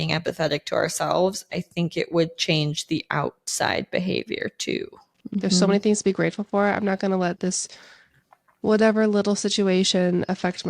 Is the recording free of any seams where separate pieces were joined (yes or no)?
no